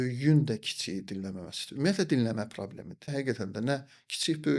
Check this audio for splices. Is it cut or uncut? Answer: cut